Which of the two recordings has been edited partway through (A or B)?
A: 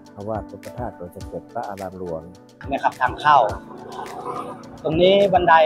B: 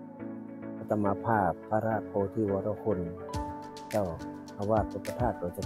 A